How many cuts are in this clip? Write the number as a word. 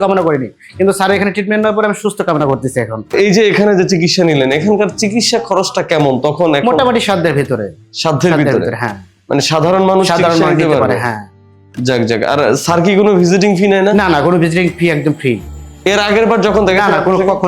one